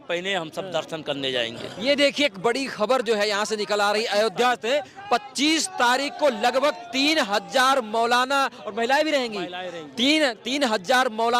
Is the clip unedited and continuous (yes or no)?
yes